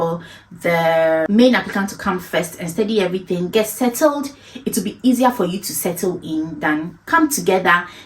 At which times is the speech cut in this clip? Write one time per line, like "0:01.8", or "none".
0:01.3